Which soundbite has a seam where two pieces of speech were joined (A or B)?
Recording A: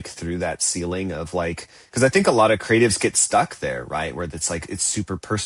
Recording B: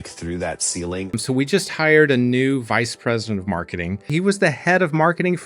B